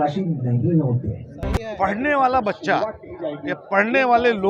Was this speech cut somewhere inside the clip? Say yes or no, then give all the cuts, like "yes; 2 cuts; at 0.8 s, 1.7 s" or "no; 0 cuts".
yes; 1 cut; at 1.7 s